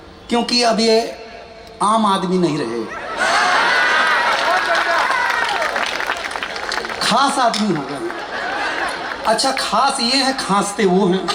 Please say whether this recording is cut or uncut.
uncut